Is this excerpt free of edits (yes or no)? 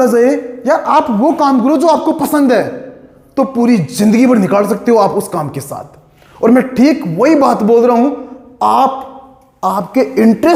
yes